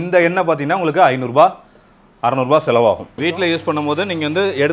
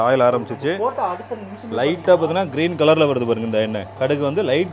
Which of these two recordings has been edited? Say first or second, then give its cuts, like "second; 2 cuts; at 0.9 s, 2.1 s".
first; 1 cut; at 3.1 s